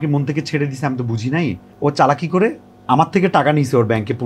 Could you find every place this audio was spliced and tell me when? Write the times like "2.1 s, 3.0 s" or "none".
1.7 s